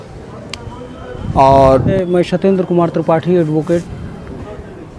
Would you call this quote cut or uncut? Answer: cut